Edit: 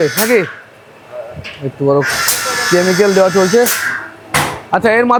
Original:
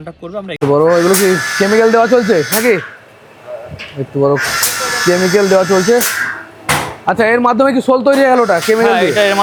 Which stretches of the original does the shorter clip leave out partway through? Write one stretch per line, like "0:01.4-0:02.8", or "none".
none